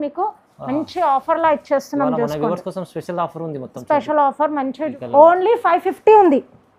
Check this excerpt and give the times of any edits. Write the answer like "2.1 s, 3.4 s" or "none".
4.9 s